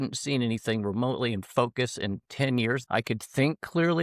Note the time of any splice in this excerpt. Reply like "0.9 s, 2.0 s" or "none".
2.8 s

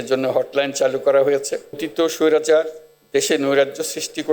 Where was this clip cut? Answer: 1.9 s

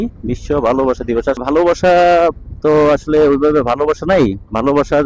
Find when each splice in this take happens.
1.4 s

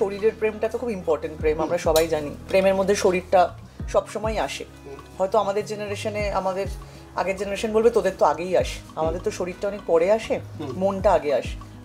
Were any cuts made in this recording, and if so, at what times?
2.3 s

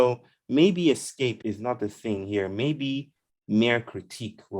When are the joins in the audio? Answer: 1.4 s

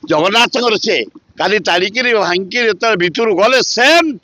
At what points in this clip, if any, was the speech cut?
1.2 s

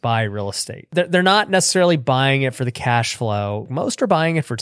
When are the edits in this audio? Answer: 0.9 s, 3.7 s

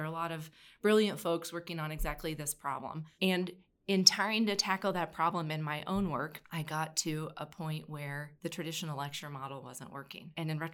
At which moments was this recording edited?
6.4 s, 8.3 s

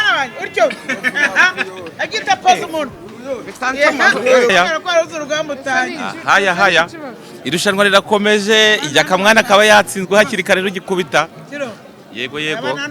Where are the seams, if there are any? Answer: 4.5 s

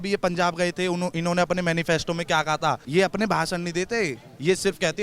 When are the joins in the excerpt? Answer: 2.8 s

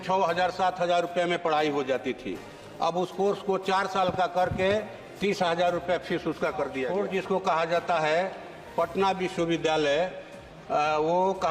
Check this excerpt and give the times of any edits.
6.9 s

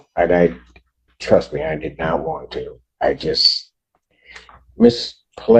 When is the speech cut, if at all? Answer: none

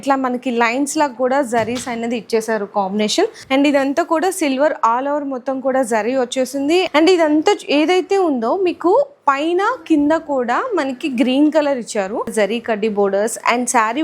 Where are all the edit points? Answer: 3.4 s, 6.9 s, 12.3 s

